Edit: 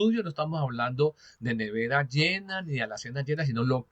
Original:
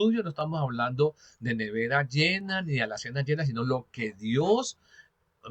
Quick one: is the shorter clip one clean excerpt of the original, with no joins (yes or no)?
yes